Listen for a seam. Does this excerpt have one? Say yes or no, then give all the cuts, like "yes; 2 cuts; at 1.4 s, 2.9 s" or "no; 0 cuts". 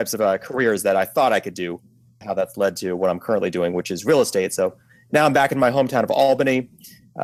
no; 0 cuts